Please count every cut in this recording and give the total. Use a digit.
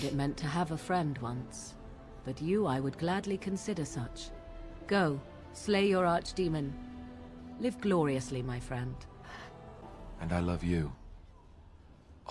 1